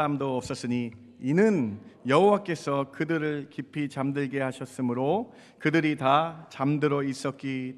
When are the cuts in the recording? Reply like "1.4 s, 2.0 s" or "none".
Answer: none

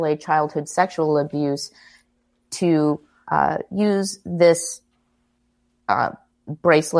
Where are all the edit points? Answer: none

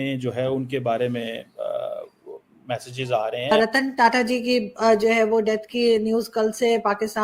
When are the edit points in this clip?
3.5 s

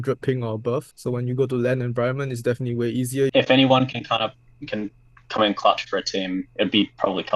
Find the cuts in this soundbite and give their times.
0.9 s, 3.3 s

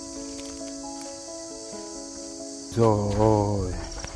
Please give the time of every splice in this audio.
2.7 s

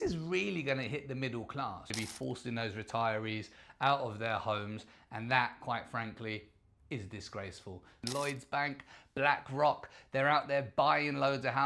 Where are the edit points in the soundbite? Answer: 1.9 s, 8.0 s

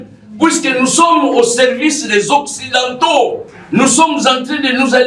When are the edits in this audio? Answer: none

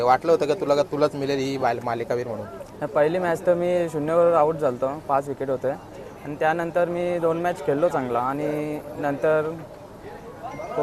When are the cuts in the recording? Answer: none

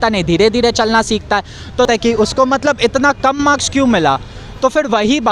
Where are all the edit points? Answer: 1.9 s

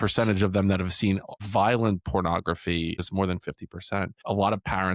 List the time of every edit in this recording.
1.4 s, 3.0 s, 4.2 s

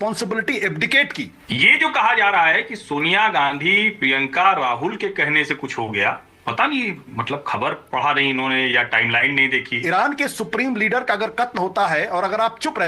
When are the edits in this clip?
1.4 s, 9.8 s

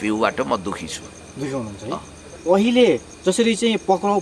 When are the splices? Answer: 2.2 s

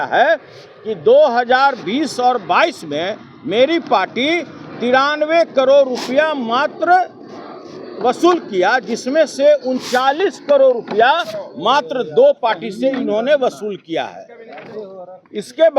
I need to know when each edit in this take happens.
none

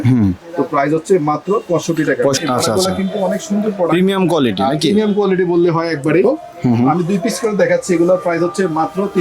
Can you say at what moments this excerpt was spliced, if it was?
2.4 s, 6.2 s

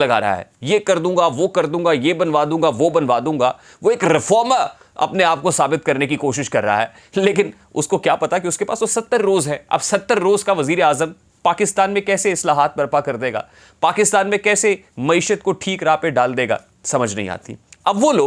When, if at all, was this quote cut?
none

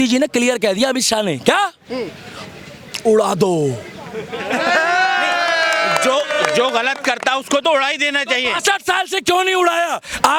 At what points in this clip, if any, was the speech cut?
none

